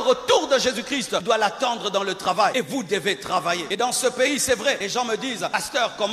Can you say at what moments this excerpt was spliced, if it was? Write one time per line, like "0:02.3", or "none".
0:01.2
0:02.5
0:03.7
0:05.1